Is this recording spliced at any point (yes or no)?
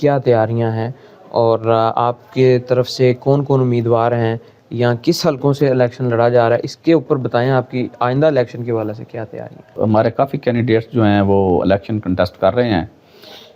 no